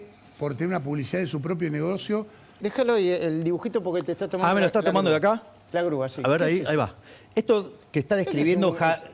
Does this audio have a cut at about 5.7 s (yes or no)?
no